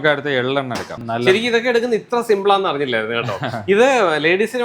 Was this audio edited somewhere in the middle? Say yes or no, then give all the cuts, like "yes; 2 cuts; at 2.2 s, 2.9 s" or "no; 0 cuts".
yes; 1 cut; at 0.9 s